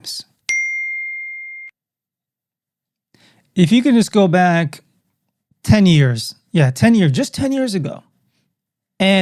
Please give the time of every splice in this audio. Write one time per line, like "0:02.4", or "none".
none